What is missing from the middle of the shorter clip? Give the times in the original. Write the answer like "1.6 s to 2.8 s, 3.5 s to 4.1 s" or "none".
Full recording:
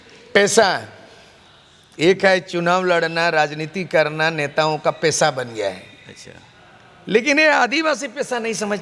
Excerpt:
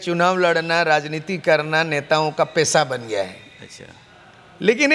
none